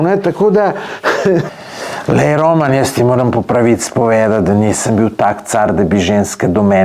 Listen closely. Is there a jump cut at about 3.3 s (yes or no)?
no